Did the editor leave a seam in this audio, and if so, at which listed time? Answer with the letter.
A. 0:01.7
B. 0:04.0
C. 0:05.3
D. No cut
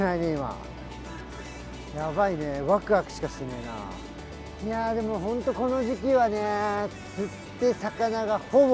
B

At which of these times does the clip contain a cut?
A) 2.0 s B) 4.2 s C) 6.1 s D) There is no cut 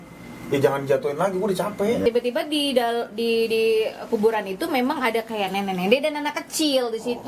A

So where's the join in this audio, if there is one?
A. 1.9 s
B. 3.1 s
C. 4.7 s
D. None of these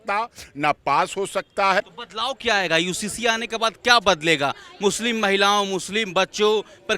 A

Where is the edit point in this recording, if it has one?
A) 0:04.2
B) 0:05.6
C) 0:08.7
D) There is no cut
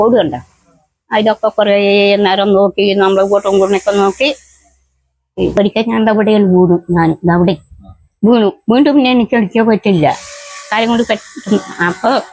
B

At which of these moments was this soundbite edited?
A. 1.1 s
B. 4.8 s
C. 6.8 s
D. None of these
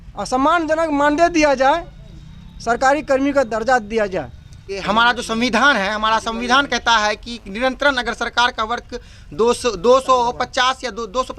B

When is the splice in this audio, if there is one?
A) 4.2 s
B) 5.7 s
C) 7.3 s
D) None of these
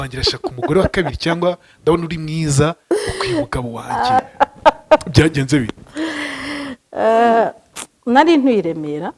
A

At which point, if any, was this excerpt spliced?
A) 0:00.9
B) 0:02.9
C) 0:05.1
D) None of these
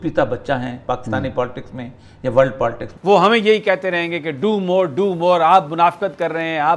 B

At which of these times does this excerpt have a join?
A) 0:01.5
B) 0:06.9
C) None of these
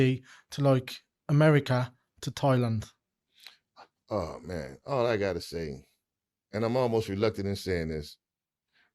C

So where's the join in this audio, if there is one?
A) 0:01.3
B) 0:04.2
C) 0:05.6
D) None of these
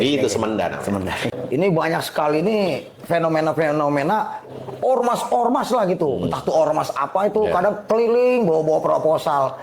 A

